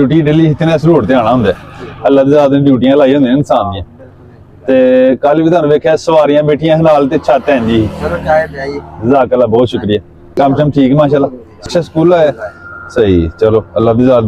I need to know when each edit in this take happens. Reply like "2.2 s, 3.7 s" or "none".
10.2 s, 11.7 s